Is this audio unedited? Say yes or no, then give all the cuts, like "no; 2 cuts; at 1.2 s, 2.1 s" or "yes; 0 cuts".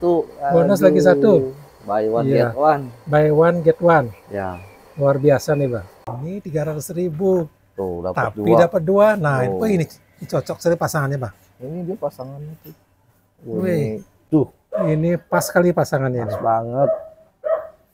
no; 2 cuts; at 6.0 s, 14.2 s